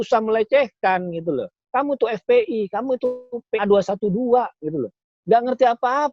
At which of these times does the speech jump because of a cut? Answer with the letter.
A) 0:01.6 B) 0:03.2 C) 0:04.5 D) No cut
A